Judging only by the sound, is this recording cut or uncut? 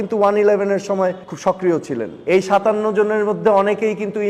cut